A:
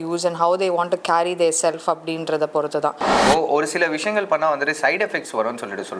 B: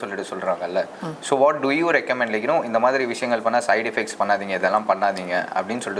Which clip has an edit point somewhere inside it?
A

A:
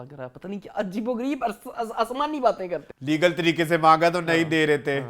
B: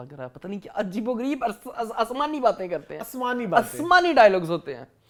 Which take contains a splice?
A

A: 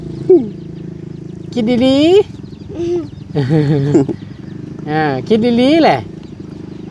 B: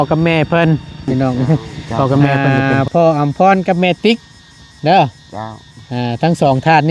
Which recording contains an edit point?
B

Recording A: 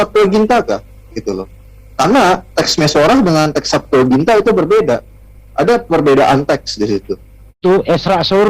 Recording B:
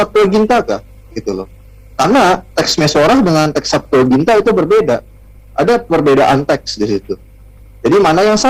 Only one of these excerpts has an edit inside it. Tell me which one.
A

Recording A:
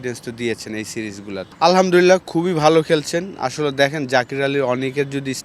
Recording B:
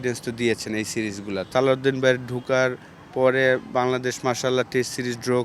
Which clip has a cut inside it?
B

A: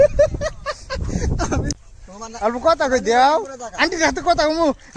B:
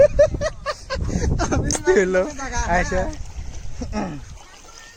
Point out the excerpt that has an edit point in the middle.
A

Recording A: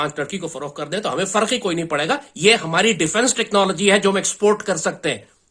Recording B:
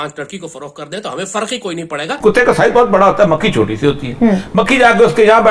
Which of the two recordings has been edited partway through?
B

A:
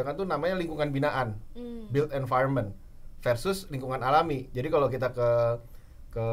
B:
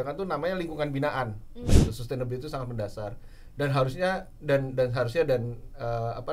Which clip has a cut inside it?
B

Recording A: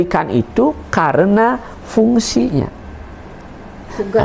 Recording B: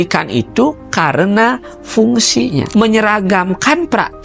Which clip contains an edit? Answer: B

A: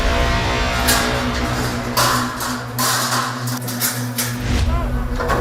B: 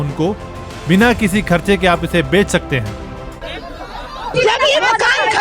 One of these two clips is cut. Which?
B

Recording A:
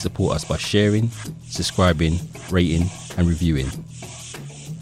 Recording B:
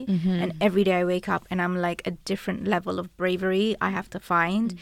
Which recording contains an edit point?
A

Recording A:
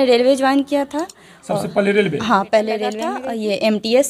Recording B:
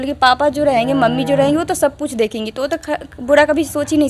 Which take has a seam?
A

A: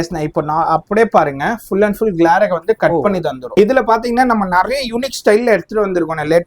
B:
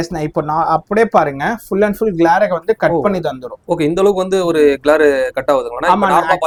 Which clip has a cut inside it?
A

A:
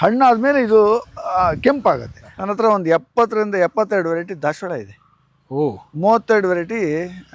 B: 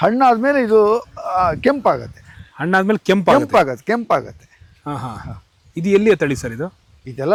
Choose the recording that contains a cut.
A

